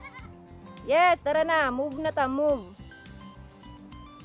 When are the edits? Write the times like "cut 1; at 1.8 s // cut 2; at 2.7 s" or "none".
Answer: cut 1; at 2.8 s